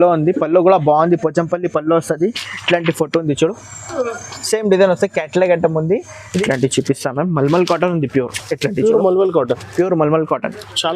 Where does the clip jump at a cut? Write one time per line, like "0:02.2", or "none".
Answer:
0:06.2